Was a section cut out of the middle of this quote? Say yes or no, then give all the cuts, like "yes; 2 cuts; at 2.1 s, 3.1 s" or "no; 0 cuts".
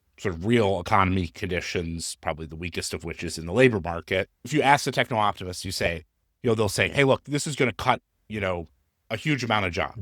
yes; 1 cut; at 4.4 s